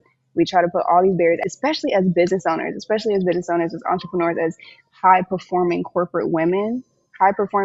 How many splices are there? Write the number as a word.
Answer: one